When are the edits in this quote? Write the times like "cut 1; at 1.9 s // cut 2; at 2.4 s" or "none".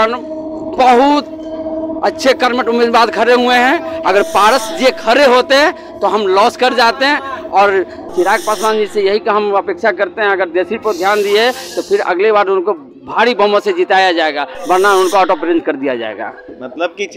cut 1; at 8.0 s